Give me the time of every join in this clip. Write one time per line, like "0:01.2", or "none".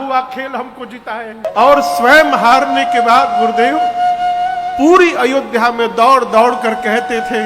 0:01.5